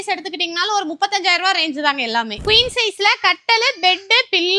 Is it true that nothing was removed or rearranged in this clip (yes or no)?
no